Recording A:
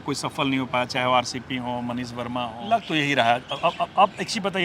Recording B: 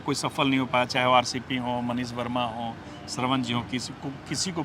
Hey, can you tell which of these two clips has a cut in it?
A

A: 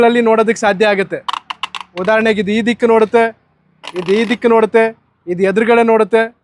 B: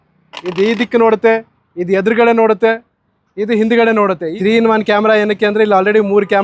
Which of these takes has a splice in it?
B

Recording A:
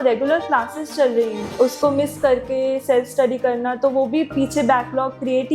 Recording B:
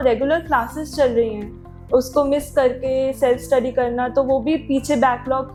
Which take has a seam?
A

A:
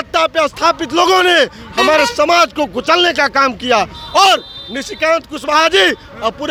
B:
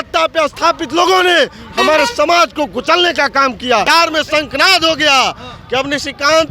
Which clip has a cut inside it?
B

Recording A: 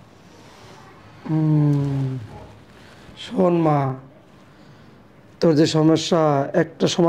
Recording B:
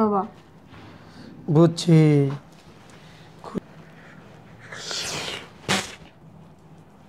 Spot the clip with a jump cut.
B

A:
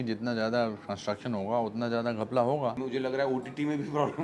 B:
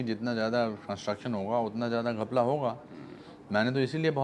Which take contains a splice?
A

